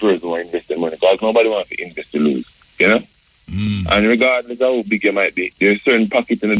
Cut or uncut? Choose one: uncut